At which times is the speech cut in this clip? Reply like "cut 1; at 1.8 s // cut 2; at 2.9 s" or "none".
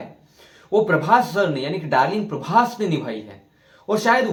none